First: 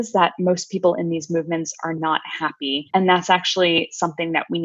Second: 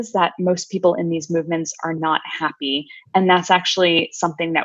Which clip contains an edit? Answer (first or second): first